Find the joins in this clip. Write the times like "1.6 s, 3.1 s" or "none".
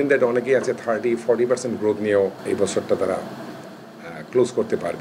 2.4 s